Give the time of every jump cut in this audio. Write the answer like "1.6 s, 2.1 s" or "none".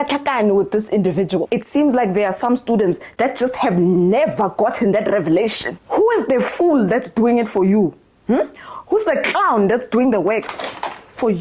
1.5 s, 5.7 s